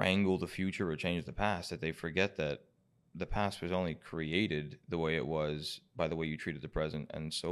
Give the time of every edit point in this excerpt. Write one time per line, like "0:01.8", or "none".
none